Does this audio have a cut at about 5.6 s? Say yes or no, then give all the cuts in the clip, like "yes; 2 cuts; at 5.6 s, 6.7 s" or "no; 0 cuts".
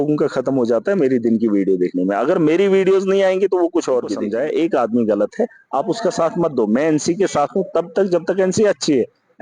no; 1 cut; at 4.2 s